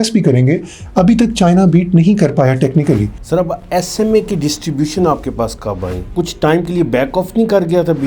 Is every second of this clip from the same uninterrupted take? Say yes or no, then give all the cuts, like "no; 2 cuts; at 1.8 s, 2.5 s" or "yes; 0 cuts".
no; 2 cuts; at 3.2 s, 6.1 s